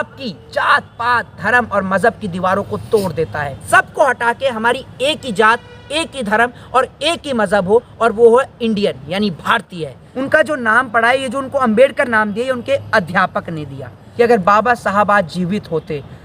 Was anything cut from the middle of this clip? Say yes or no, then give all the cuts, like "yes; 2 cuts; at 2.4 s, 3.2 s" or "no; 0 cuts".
yes; 3 cuts; at 3.6 s, 10.1 s, 14.0 s